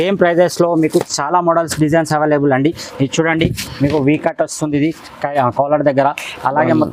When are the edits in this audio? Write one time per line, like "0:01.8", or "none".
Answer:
none